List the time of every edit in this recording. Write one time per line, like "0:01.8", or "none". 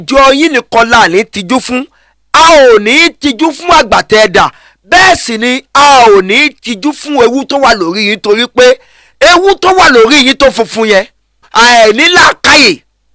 0:11.5